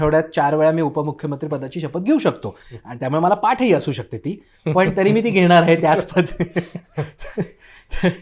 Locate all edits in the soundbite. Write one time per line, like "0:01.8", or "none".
none